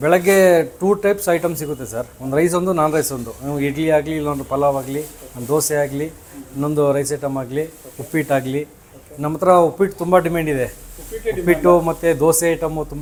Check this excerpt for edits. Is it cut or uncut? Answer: uncut